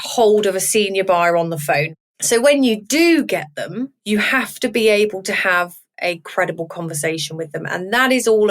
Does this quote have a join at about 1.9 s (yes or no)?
yes